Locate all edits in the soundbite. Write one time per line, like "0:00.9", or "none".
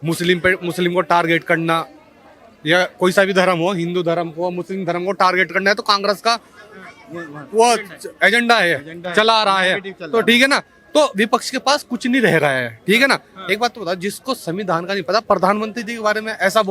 none